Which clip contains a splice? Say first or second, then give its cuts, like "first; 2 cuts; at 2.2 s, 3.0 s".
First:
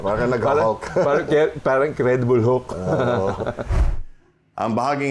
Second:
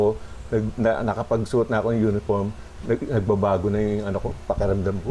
first; 1 cut; at 3.7 s